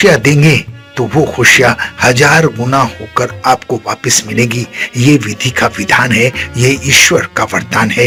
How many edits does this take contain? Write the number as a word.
zero